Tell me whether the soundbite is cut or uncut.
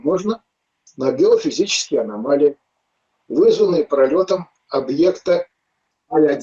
uncut